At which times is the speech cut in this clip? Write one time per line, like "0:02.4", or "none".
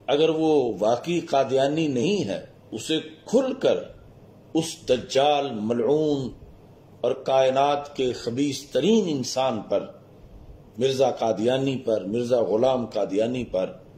0:02.7